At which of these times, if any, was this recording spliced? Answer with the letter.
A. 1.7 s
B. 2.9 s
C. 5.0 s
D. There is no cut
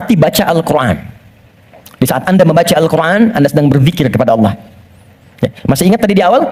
D